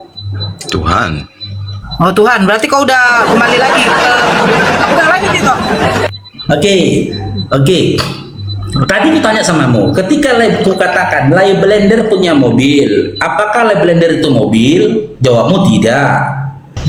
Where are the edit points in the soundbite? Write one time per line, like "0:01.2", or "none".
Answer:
none